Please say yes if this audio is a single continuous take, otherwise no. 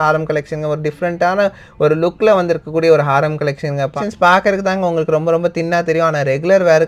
no